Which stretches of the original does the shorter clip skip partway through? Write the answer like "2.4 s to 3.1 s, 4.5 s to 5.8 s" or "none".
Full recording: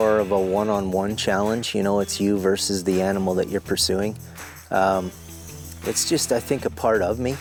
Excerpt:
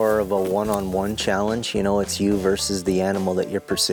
none